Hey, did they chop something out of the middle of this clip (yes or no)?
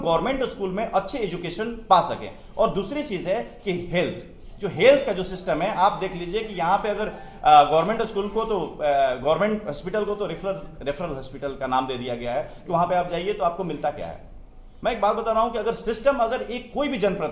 no